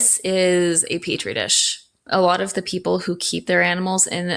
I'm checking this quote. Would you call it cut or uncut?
cut